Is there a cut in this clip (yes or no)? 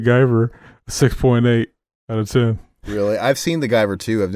yes